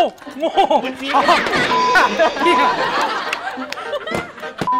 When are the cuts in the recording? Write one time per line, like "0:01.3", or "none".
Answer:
none